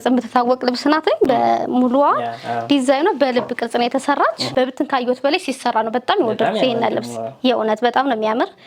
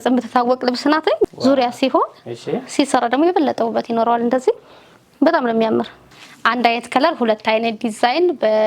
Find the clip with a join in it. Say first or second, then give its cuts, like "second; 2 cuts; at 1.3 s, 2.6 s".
second; 2 cuts; at 1.3 s, 6.2 s